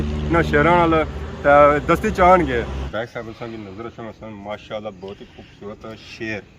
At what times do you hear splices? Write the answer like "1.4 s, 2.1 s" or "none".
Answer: 2.8 s